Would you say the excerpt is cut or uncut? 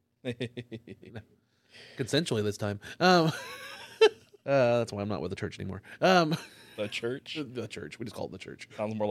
cut